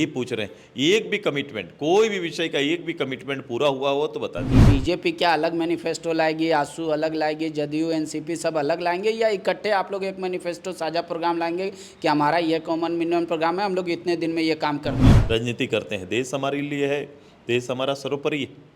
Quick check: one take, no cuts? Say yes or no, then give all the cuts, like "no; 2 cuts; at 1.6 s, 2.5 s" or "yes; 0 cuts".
no; 2 cuts; at 4.6 s, 15.1 s